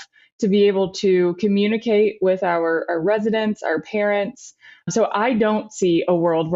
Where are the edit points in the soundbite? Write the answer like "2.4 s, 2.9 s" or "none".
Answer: 4.9 s